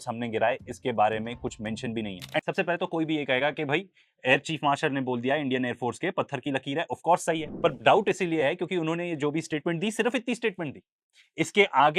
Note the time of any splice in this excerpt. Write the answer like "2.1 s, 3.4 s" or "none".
2.4 s